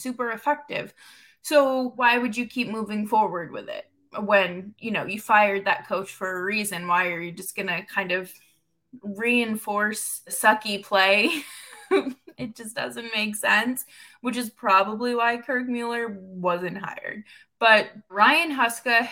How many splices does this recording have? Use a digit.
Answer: 3